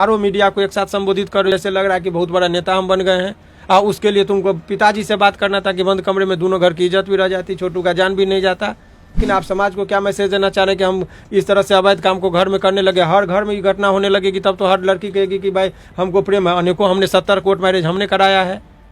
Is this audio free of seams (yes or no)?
no